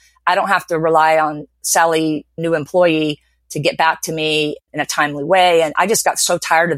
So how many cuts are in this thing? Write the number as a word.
two